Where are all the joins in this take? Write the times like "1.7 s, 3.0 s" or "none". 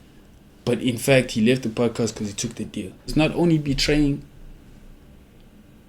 3.1 s